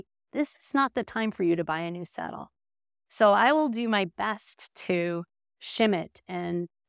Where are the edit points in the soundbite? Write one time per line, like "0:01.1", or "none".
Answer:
none